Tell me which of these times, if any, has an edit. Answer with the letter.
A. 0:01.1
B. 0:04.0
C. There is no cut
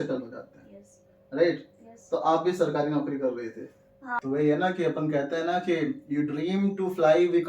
B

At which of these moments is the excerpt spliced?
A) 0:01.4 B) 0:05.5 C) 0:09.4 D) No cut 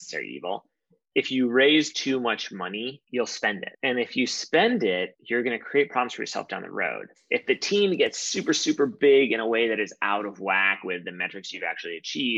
D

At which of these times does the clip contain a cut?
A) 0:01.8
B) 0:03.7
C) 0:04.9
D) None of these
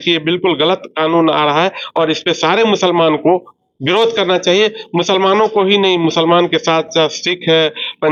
D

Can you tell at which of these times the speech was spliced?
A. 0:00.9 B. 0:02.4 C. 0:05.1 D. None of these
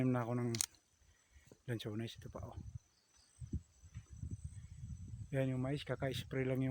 D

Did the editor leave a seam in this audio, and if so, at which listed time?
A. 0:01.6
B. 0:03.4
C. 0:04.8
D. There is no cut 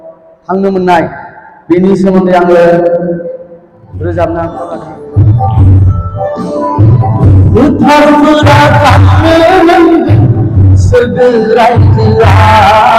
C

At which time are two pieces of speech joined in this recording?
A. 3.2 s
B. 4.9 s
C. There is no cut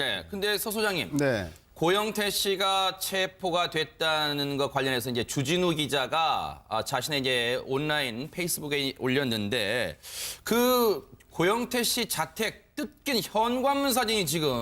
B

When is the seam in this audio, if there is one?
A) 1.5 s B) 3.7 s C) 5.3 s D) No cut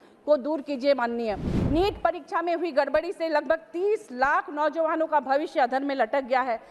A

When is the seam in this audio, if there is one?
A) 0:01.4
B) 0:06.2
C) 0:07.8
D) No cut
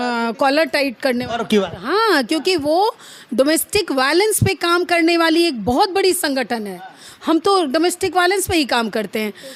D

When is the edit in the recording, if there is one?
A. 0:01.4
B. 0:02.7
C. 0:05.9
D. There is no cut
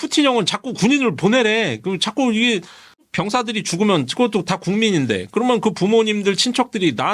D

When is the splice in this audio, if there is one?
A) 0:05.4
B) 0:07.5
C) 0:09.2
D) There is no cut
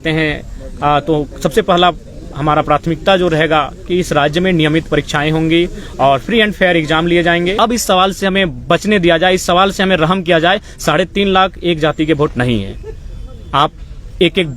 B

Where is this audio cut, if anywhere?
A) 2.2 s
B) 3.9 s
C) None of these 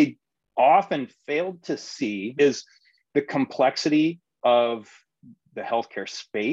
A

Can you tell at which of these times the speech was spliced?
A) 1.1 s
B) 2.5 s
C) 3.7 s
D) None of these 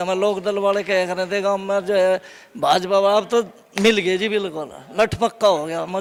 D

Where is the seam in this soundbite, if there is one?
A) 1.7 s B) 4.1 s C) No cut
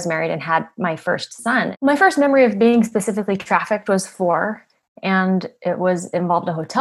A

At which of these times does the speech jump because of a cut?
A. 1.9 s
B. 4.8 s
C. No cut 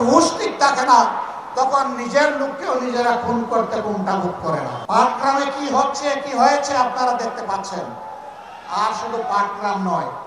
B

